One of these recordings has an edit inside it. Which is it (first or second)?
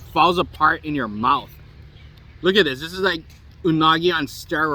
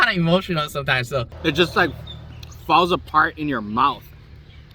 second